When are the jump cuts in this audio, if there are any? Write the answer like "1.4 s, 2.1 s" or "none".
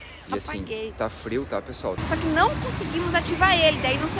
2.0 s

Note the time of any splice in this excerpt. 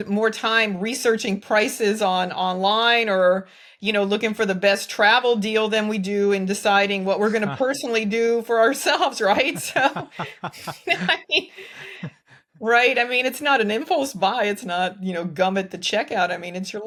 none

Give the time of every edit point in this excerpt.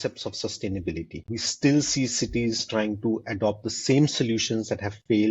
1.3 s

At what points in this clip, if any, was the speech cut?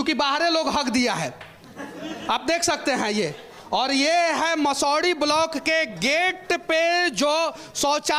none

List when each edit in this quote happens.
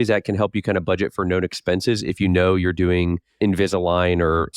3.2 s

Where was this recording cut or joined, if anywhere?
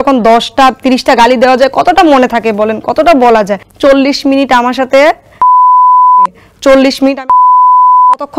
3.6 s

